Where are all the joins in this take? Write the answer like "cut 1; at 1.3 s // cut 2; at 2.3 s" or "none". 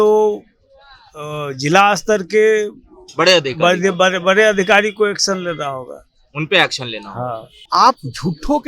cut 1; at 7.7 s

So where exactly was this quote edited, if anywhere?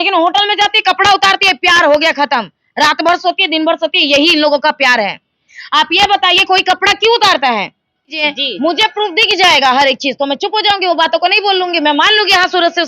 cut 1; at 8.3 s

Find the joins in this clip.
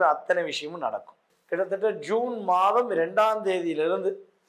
cut 1; at 1.3 s

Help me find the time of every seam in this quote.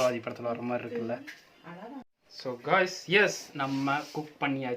cut 1; at 2.2 s

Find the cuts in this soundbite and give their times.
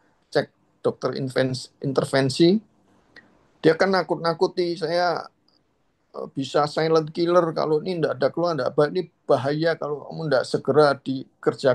none

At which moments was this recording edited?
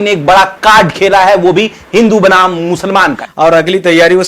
cut 1; at 3.2 s

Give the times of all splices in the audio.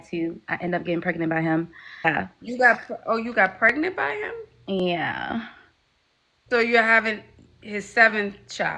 cut 1; at 2.0 s

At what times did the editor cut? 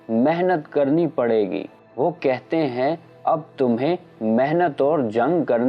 cut 1; at 1.8 s

